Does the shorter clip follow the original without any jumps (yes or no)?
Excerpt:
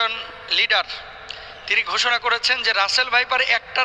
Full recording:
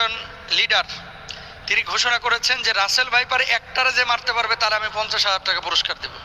yes